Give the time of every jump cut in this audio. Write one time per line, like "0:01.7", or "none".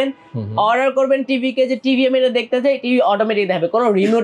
none

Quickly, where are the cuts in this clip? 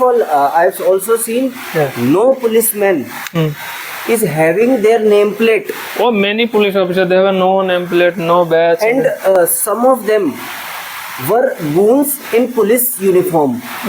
none

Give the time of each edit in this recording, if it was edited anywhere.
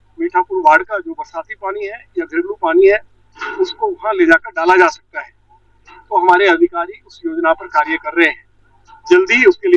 none

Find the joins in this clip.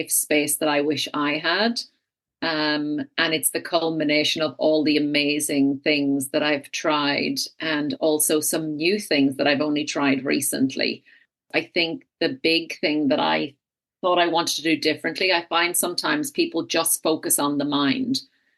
0:11.5

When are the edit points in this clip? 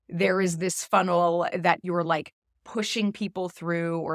0:01.8

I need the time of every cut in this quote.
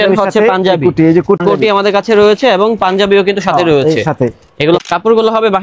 0:01.4
0:04.8

